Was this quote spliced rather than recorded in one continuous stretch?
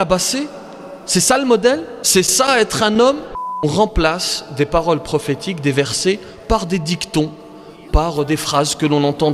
yes; 1 cut; at 3.6 s

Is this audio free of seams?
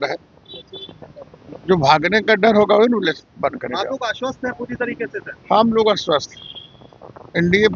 yes; 0 cuts

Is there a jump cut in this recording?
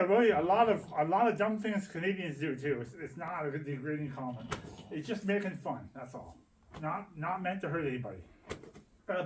no; 0 cuts

